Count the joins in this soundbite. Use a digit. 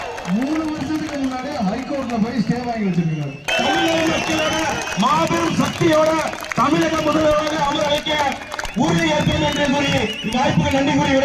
1